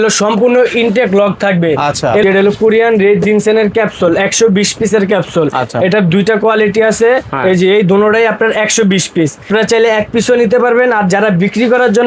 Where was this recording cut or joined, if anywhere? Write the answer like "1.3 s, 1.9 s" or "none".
2.2 s, 9.5 s